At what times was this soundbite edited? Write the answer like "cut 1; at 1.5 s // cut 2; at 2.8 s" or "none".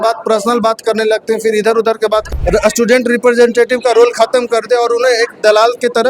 cut 1; at 2.3 s